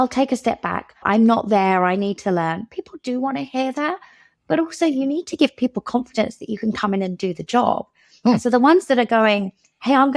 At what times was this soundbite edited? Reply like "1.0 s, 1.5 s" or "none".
1.0 s